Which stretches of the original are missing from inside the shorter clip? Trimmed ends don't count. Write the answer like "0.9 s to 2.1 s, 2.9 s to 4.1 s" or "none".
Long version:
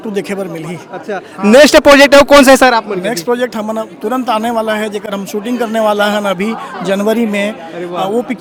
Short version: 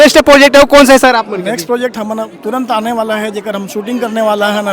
none